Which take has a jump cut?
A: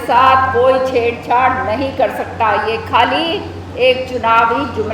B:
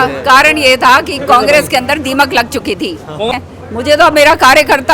B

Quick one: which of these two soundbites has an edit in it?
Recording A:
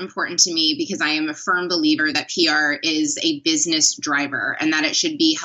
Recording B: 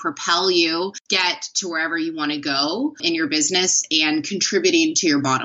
B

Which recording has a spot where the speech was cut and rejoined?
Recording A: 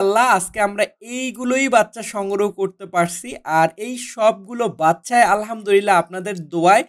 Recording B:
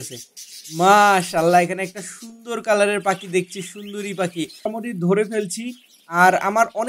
B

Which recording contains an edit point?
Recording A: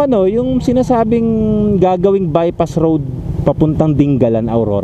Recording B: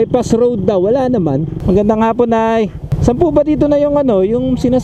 B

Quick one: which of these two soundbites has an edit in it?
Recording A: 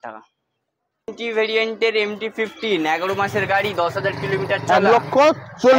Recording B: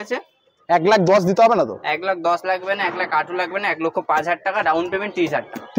A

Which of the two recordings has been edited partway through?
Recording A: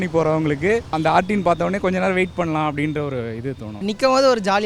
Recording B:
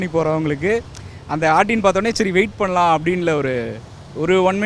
A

